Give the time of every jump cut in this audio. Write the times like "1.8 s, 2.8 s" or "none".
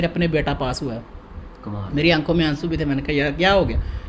none